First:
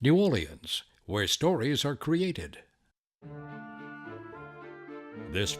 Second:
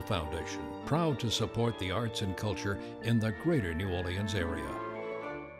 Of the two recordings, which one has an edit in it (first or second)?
first